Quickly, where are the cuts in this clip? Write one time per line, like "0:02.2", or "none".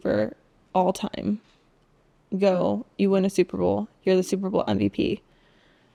none